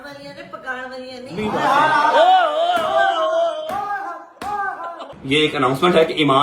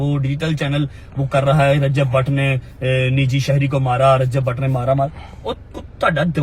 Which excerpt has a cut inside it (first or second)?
first